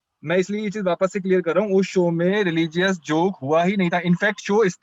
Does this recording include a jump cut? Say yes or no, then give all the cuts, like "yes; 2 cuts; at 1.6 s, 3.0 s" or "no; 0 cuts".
no; 0 cuts